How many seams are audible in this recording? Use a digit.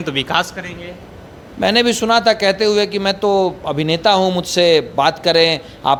0